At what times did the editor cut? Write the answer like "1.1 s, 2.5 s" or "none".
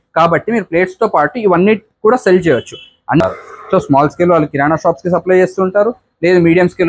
3.2 s

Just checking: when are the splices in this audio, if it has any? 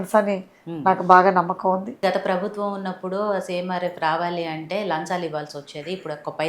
1.9 s

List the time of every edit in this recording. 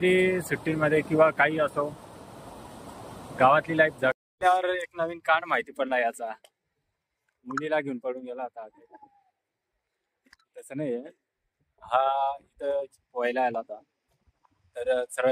4.1 s

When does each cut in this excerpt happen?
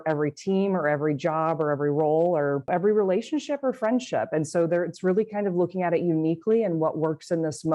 2.7 s

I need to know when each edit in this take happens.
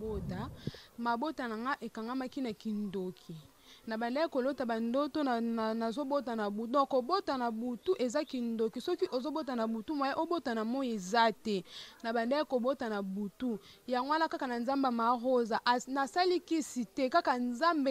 none

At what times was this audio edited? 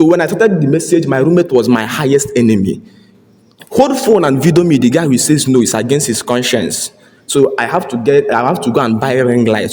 none

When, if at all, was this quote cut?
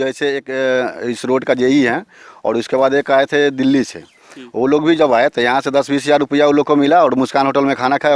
none

